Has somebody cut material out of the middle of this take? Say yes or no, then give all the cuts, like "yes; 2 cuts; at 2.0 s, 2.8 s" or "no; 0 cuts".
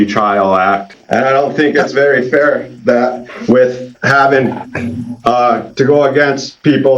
yes; 1 cut; at 0.9 s